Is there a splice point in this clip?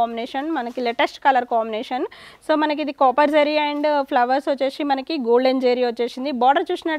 no; 0 cuts

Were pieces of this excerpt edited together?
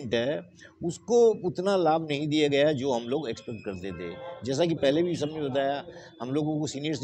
no; 0 cuts

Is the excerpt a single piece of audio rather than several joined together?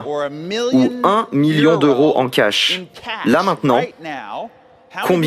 yes; 0 cuts

